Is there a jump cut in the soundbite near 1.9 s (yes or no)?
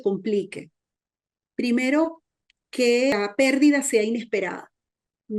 no